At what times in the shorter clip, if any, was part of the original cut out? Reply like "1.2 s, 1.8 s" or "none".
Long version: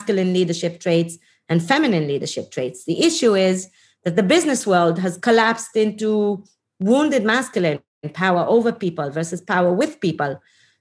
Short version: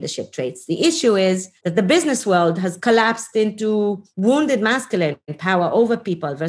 1.5 s, 4.1 s, 5.3 s